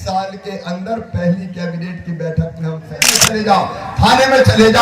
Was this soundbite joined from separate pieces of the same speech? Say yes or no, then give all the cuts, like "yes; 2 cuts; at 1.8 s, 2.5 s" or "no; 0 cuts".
yes; 1 cut; at 3.3 s